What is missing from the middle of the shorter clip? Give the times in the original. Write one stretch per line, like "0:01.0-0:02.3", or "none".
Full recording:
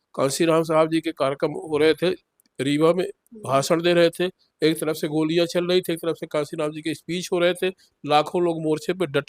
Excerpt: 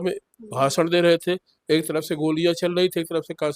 none